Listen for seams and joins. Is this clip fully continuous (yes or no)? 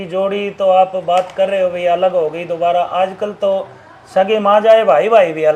yes